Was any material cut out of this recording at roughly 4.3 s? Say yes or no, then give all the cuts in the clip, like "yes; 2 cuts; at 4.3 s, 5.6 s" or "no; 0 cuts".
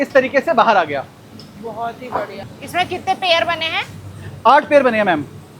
no; 1 cut; at 2.4 s